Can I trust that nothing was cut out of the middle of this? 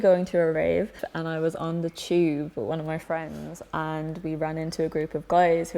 yes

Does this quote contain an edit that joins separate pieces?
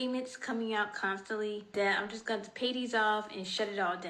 yes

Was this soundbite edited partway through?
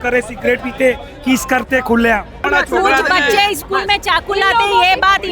yes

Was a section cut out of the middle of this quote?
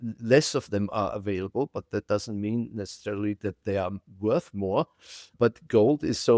yes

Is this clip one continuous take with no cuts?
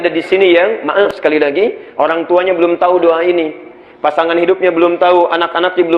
no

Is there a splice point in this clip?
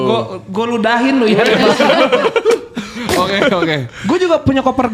no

